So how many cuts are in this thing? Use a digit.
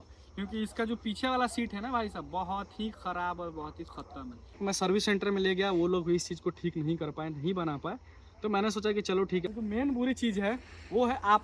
2